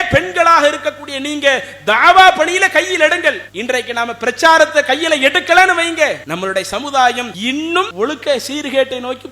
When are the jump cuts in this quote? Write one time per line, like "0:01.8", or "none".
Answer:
0:06.2
0:07.5

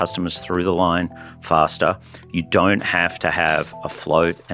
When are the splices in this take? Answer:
none

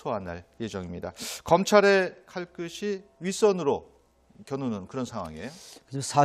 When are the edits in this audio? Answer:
none

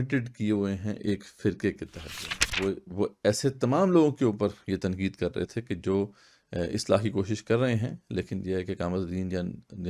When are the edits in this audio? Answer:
0:02.5

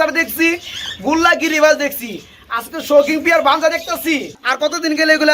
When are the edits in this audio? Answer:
0:04.4

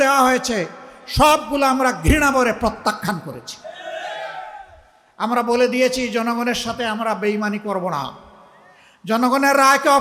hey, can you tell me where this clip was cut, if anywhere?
none

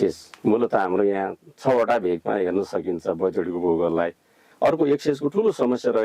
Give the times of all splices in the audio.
0:04.4

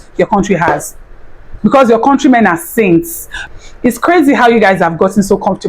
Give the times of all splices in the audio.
0:03.4

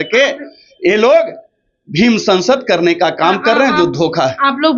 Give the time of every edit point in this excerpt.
none

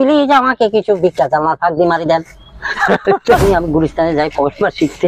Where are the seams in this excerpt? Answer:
0:03.4

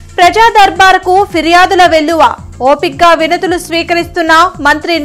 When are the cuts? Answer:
none

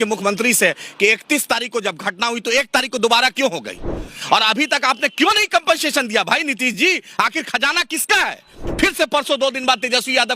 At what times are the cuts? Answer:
0:08.6

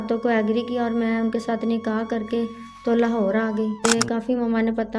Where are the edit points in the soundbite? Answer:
0:03.8

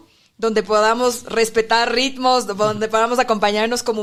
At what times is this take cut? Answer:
none

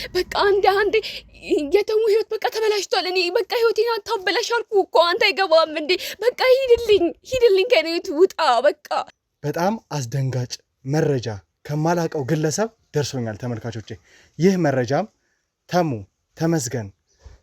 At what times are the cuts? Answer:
0:09.1

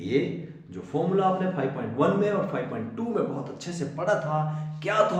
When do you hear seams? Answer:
none

